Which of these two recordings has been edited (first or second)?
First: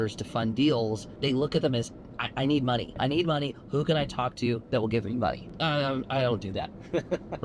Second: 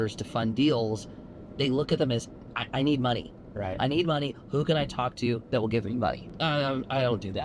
first